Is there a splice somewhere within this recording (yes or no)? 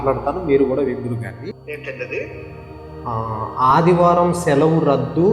yes